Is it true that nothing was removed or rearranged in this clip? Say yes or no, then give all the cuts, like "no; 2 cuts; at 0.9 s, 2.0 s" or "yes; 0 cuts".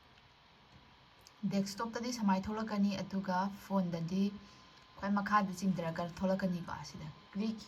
yes; 0 cuts